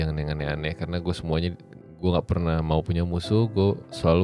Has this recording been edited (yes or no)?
no